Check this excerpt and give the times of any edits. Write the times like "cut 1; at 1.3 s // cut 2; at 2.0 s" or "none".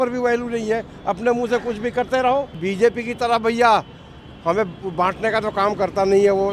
cut 1; at 2.6 s